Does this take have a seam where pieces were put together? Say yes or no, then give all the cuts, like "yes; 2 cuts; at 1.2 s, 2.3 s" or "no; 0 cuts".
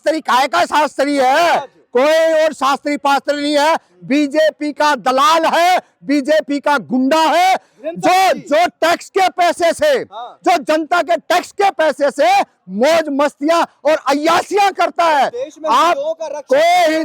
no; 0 cuts